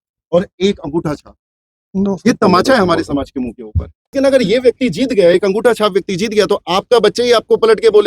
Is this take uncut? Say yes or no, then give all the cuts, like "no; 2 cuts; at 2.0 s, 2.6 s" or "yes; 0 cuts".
no; 1 cut; at 4.1 s